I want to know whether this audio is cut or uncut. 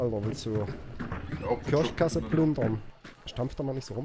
cut